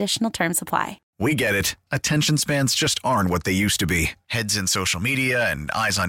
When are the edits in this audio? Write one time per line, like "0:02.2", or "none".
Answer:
0:01.0